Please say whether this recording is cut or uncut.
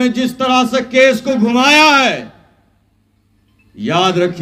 uncut